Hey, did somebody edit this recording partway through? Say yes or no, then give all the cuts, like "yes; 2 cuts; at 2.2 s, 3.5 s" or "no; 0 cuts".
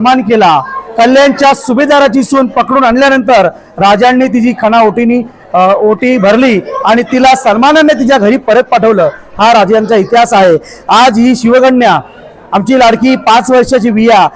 no; 0 cuts